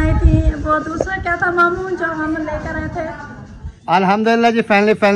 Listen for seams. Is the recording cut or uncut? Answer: cut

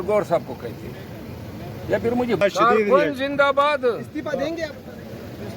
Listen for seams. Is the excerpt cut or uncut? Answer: cut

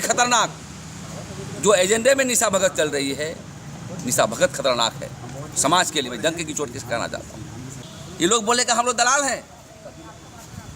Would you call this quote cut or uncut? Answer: cut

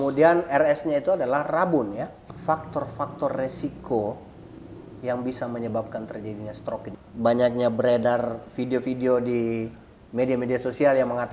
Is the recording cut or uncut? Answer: cut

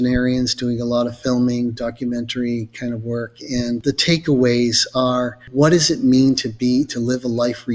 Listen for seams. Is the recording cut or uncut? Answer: cut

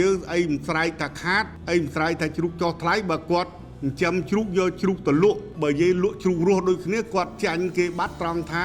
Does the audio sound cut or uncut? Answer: cut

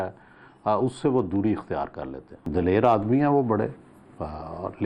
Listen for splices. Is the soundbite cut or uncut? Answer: cut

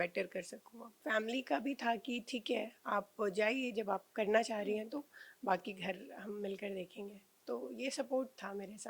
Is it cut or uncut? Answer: cut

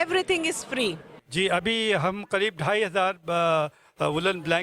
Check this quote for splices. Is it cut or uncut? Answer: cut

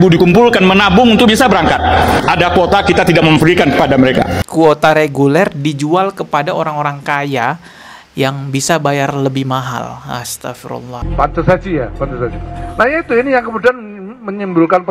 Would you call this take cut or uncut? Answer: cut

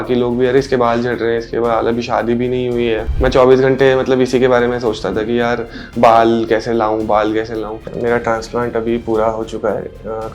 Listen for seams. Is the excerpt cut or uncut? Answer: cut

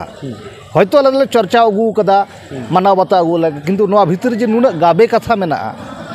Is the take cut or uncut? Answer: uncut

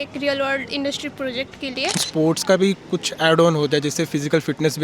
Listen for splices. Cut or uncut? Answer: cut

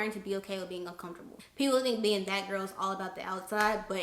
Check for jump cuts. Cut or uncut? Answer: cut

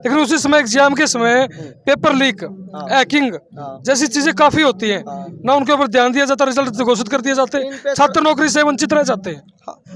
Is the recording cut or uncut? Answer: uncut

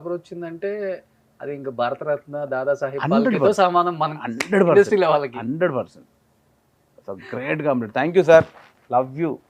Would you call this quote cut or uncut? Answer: uncut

